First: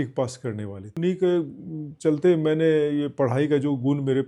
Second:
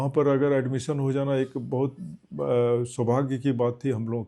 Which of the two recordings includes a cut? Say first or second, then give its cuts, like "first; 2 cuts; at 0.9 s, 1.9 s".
first; 1 cut; at 1.0 s